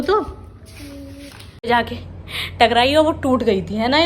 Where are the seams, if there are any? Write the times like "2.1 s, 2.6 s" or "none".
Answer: 1.7 s

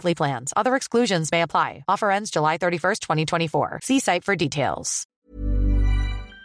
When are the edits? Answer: 5.2 s

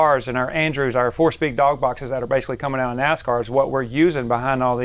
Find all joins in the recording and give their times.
none

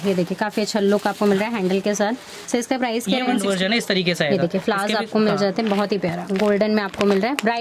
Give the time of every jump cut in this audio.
3.5 s

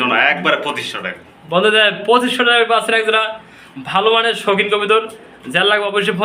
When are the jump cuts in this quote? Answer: none

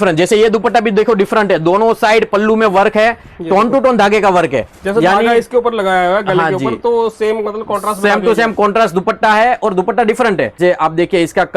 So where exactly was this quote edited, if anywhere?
10.6 s

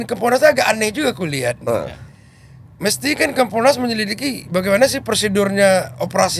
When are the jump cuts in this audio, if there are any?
none

